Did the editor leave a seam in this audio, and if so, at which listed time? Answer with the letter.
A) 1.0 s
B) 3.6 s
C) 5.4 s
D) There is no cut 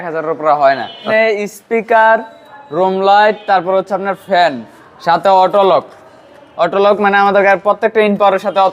A